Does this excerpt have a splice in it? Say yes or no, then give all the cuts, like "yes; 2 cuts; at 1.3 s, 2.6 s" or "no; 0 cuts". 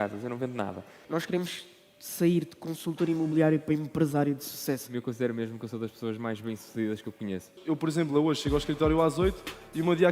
yes; 3 cuts; at 0.9 s, 4.9 s, 7.5 s